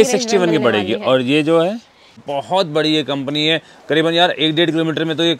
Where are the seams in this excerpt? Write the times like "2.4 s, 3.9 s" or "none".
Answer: 2.2 s